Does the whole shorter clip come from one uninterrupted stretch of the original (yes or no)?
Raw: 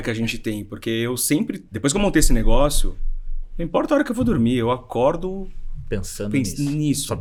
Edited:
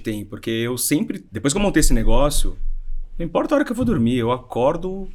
yes